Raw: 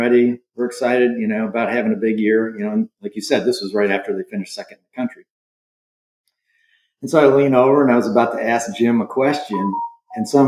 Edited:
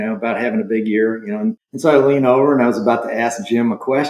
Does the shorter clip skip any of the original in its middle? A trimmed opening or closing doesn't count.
yes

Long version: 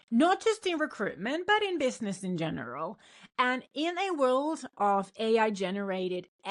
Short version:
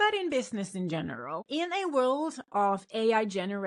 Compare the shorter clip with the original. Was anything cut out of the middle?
yes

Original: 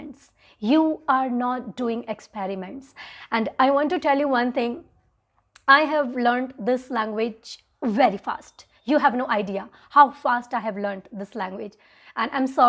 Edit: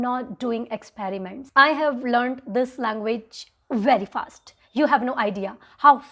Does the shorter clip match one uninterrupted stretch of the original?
no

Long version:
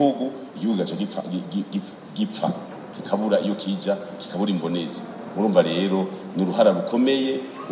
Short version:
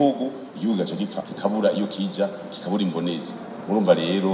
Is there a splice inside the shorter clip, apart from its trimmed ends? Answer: yes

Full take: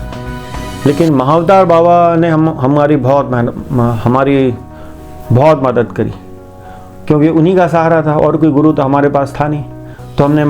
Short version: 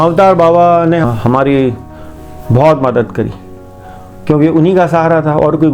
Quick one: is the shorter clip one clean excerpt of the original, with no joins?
no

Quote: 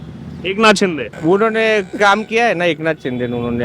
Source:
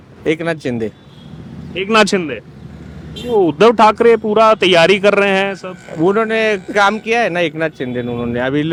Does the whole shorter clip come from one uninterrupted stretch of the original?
no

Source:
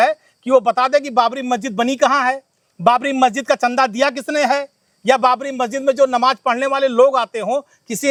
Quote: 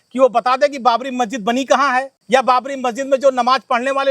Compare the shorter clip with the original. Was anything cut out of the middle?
yes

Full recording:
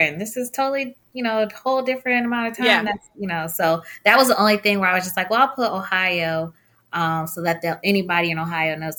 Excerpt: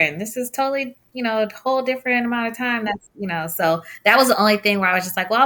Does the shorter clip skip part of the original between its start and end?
no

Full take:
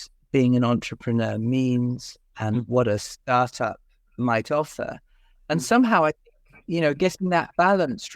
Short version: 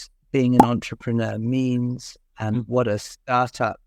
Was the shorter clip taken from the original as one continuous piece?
yes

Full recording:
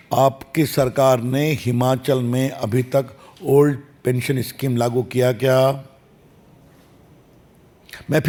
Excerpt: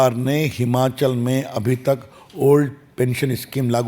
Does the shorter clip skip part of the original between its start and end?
no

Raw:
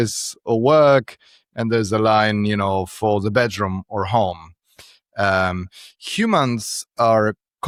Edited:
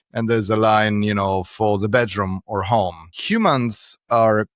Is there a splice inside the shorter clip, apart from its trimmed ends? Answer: yes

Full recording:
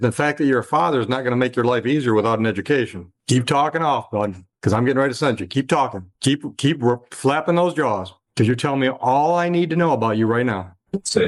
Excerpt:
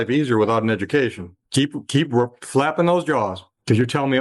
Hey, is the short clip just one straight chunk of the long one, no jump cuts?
no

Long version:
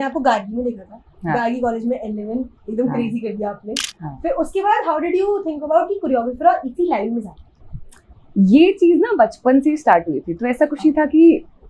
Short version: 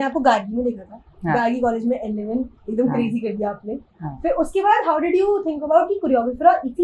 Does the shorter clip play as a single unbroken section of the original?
yes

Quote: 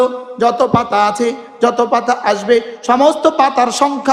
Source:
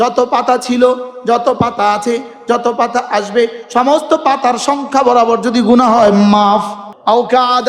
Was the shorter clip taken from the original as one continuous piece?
yes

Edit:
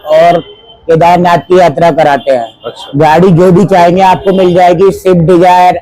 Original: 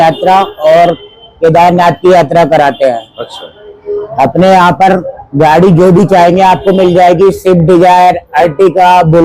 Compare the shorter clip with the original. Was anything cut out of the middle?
yes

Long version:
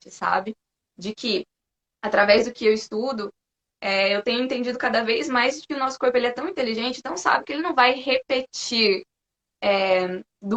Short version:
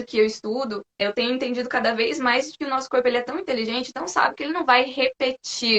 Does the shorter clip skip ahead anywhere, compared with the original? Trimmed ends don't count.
yes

